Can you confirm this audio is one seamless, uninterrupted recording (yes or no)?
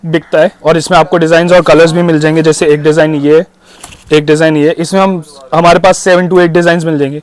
yes